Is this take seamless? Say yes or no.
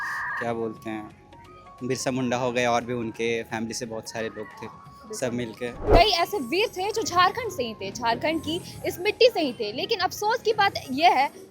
no